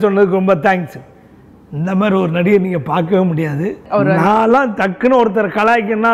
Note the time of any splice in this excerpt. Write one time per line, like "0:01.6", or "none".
0:03.7